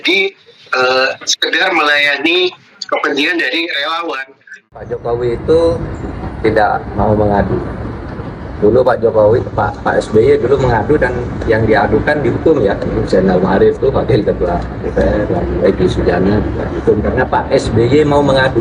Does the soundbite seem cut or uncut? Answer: cut